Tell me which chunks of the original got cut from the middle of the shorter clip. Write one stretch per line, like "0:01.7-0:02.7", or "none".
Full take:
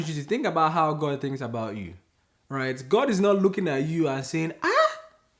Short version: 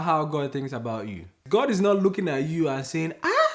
0:02.1-0:02.8